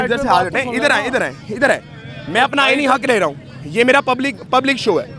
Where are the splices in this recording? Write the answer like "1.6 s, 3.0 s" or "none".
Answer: none